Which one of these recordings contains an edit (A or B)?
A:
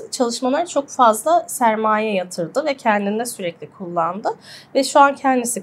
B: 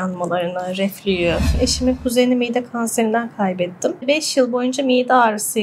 B